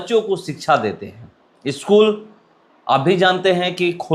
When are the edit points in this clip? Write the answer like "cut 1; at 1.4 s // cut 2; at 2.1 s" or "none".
none